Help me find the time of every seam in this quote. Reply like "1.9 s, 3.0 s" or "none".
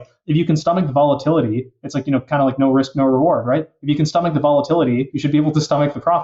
5.1 s